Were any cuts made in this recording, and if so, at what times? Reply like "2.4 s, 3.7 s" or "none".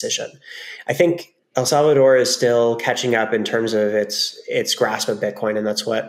1.6 s